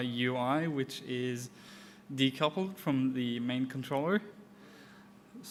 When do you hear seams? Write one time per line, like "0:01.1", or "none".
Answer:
none

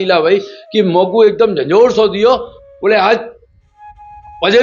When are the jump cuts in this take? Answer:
none

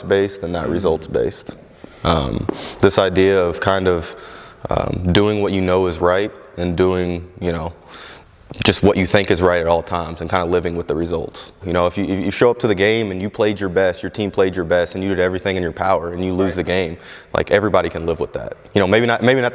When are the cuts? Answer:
0:11.6

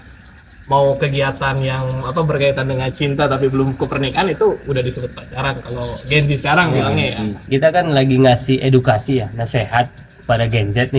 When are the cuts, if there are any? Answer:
0:07.4

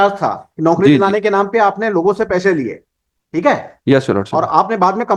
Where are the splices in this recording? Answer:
none

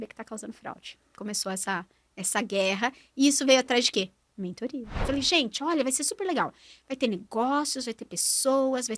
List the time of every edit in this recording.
0:01.1
0:05.0

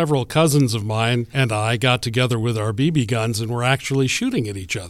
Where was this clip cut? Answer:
0:01.3

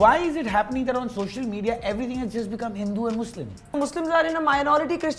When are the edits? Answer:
0:03.8

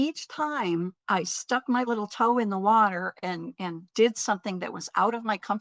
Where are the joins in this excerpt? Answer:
0:01.0

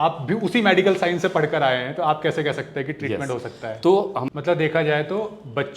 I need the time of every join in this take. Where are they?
0:04.2

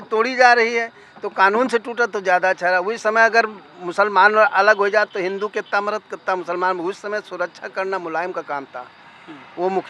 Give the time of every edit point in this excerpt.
none

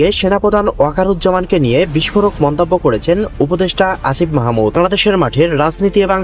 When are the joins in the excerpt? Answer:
none

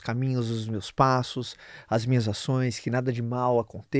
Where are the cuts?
none

